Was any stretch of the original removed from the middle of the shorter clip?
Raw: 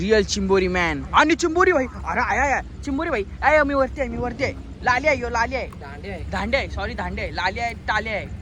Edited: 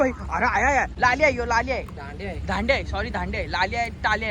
yes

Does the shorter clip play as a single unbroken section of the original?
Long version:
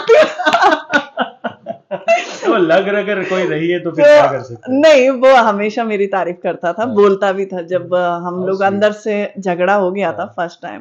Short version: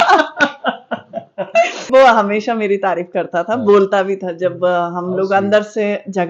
no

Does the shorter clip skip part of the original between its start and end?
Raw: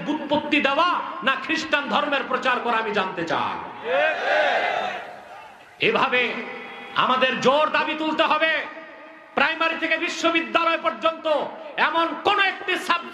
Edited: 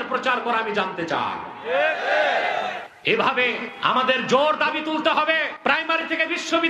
yes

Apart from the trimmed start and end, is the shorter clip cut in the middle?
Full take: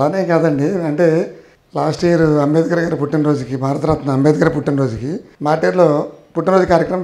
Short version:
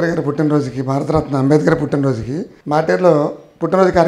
no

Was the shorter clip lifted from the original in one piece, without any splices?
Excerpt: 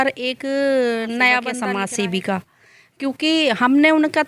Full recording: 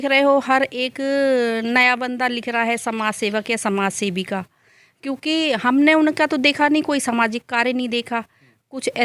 no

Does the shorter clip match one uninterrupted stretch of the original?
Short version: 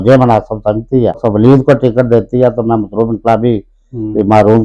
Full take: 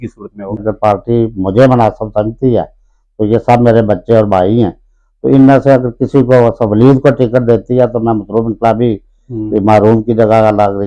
no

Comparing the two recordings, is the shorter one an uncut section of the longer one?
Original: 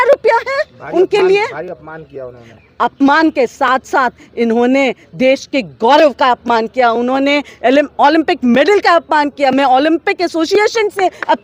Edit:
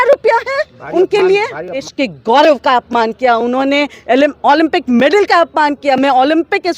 no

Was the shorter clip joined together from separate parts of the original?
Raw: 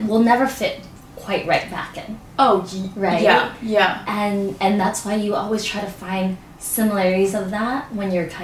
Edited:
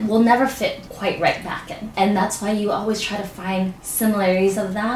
yes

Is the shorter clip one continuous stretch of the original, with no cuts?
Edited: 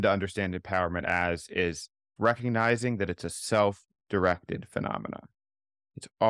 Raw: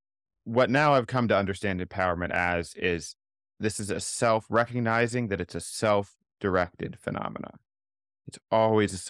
no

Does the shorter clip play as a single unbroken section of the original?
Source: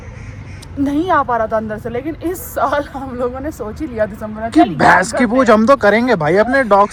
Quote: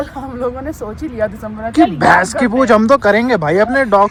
yes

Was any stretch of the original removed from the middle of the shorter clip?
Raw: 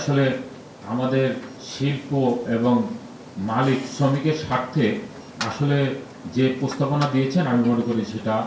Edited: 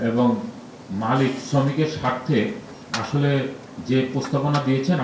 no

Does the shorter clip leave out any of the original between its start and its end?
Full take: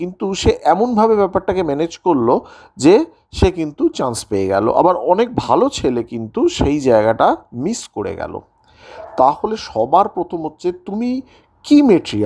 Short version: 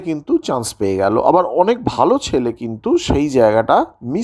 no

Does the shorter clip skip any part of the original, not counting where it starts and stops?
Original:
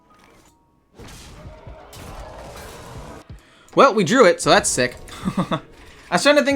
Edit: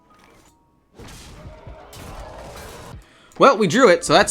yes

